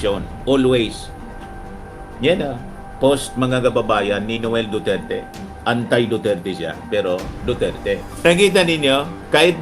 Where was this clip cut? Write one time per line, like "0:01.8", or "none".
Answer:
0:08.1